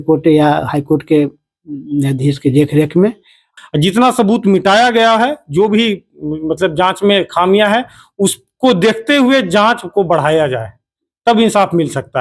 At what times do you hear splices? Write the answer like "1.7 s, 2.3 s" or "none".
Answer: 3.6 s